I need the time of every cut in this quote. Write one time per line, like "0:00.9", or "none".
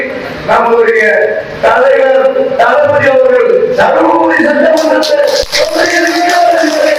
none